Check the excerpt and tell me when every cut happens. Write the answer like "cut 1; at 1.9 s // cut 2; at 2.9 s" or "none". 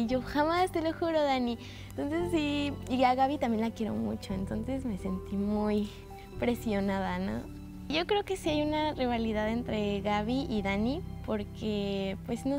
cut 1; at 9.7 s